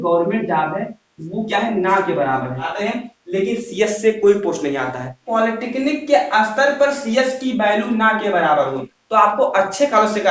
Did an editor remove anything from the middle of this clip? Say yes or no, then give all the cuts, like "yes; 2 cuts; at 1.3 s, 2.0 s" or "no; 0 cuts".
yes; 3 cuts; at 2.7 s, 5.2 s, 8.9 s